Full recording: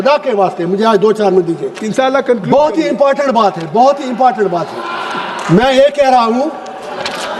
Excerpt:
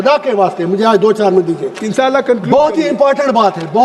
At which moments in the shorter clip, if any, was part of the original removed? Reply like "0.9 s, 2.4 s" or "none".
none